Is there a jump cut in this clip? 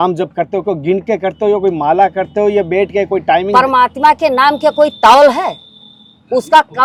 no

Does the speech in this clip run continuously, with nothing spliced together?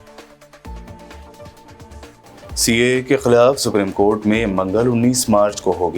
yes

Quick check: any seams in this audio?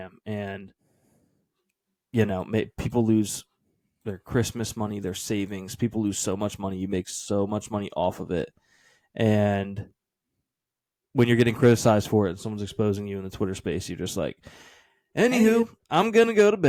no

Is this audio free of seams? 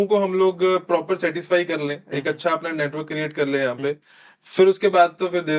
yes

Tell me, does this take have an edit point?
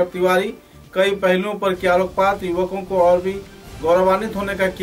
no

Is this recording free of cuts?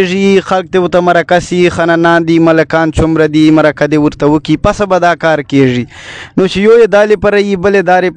yes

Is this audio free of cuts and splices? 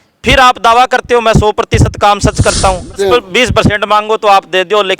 no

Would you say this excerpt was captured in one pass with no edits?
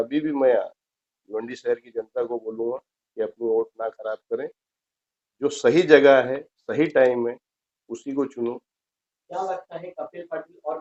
yes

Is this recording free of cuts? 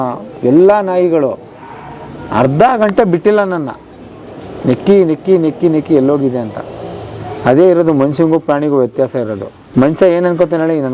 yes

